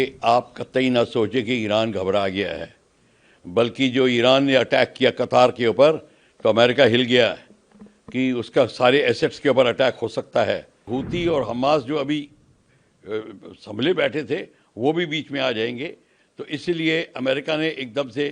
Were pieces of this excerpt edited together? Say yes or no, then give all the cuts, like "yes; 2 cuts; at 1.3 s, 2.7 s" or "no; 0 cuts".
yes; 1 cut; at 10.9 s